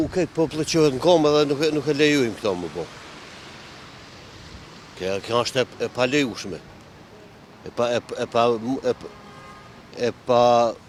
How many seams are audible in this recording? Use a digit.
0